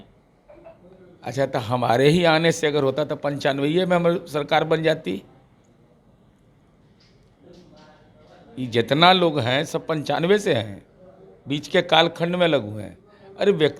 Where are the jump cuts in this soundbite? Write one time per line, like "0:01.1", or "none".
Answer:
none